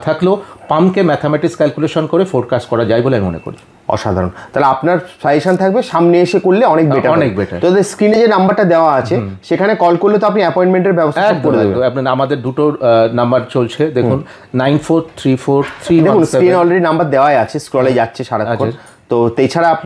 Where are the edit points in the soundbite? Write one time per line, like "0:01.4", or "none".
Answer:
none